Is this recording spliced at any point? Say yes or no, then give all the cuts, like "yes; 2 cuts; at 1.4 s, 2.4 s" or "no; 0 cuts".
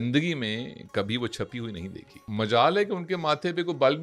yes; 1 cut; at 2.2 s